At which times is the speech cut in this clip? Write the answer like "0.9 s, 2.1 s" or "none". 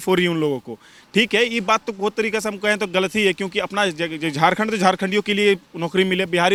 none